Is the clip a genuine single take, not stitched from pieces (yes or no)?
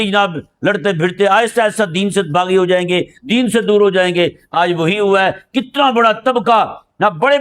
yes